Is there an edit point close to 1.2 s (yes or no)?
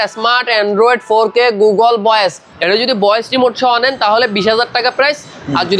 no